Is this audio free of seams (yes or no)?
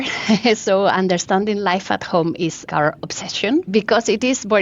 no